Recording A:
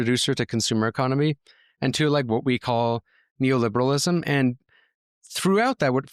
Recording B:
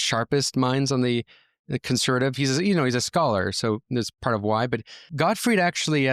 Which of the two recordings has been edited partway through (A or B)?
B